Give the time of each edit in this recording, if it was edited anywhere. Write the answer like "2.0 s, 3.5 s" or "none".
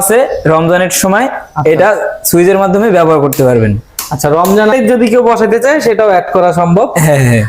4.7 s